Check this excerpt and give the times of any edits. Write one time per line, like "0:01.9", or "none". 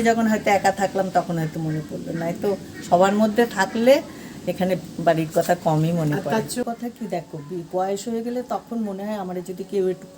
0:06.6

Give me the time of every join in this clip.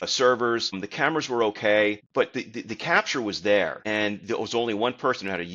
0:00.9
0:02.0
0:03.8

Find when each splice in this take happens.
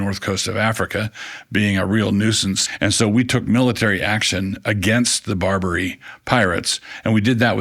0:02.7

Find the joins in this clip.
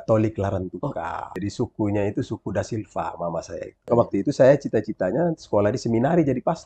0:01.3
0:03.9

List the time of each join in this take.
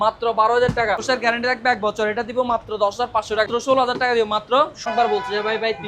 0:01.0
0:03.5
0:04.9

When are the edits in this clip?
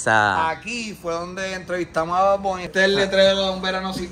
0:02.7

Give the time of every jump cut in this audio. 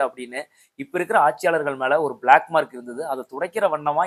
none

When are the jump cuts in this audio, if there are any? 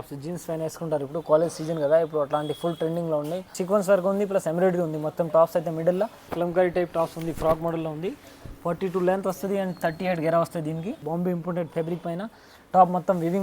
0:03.6
0:06.3
0:11.0

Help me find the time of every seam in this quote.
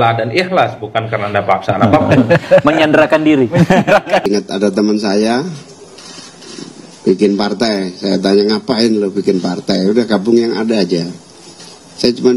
0:04.3

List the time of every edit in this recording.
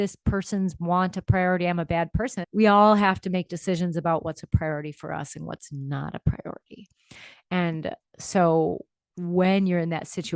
0:02.4

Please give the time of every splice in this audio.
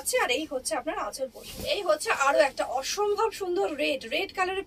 0:01.5

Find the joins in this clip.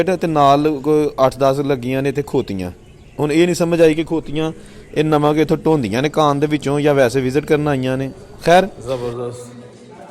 0:08.8

